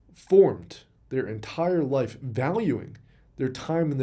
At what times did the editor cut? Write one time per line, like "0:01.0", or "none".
none